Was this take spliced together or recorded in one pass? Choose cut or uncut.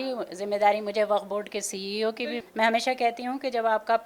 cut